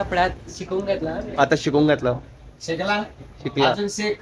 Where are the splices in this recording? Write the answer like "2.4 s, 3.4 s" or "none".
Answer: none